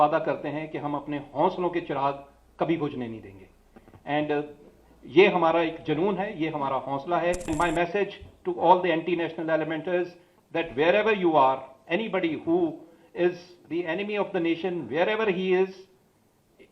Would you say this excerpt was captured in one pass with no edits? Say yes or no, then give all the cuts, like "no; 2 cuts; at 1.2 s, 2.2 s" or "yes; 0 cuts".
no; 1 cut; at 7.5 s